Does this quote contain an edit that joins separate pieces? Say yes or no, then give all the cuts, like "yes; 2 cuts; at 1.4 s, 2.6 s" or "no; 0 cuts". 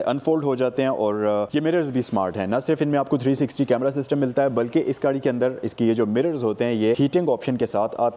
yes; 2 cuts; at 1.5 s, 7.0 s